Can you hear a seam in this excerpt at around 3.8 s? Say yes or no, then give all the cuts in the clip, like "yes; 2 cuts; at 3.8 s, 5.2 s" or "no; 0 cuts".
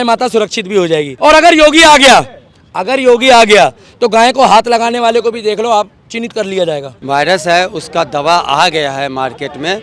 no; 2 cuts; at 1.1 s, 6.9 s